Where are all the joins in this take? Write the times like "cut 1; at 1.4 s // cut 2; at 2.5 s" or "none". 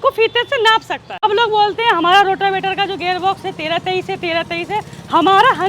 cut 1; at 1.0 s